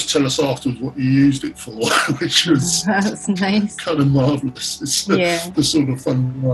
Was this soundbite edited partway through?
no; 0 cuts

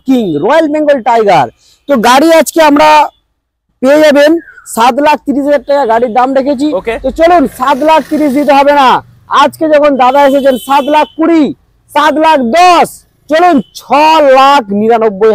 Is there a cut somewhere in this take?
no; 0 cuts

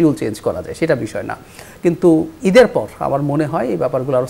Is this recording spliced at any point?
no; 0 cuts

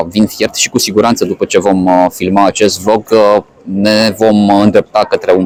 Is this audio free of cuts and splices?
yes; 0 cuts

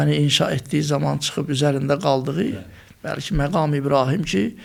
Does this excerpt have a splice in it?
no; 0 cuts

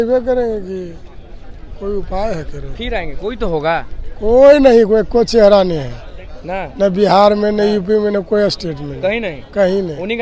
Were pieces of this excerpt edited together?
no; 0 cuts

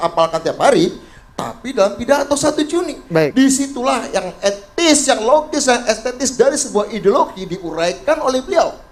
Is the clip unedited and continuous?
yes; 0 cuts

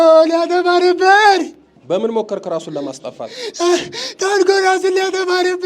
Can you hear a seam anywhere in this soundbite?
yes; 1 cut; at 1.7 s

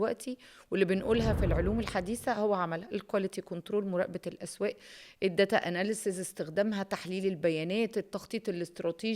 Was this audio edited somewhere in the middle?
no; 0 cuts

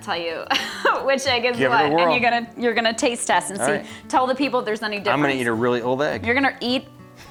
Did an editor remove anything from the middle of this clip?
no; 0 cuts

